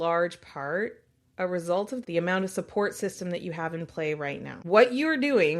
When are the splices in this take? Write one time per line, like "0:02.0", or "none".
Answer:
0:02.0
0:04.5